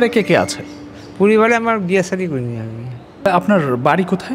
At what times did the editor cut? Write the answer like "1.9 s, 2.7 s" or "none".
3.0 s